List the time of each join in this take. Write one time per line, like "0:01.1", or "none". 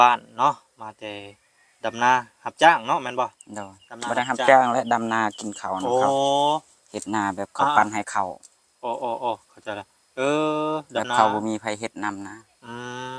none